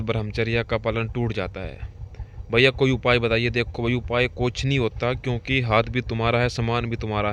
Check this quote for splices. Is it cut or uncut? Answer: uncut